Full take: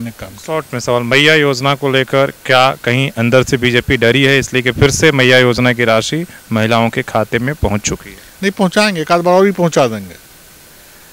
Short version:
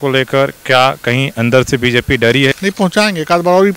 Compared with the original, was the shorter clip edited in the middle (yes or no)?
yes